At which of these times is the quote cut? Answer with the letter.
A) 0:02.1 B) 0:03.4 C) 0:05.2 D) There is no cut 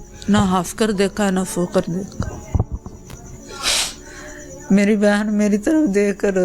B